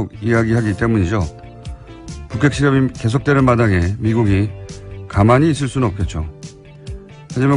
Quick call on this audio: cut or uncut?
cut